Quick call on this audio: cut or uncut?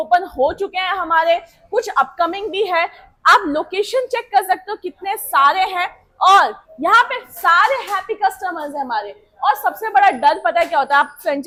uncut